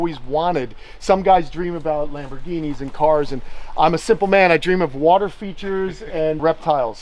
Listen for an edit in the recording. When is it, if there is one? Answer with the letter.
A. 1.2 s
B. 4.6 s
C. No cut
C